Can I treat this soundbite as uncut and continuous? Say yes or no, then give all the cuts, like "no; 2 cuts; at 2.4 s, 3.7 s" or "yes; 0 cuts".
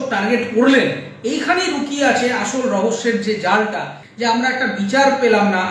no; 1 cut; at 4.0 s